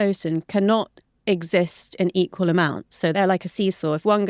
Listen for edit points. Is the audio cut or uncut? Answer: cut